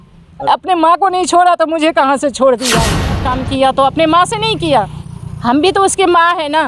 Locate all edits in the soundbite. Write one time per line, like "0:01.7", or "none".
0:03.3